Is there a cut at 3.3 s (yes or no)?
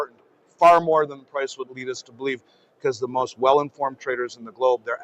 no